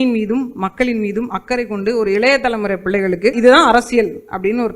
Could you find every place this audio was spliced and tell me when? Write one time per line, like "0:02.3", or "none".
0:03.4